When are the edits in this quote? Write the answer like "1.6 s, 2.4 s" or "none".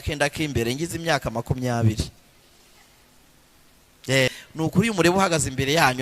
4.3 s